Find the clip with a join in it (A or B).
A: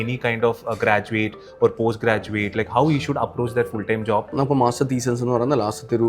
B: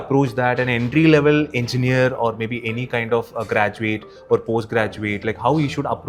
A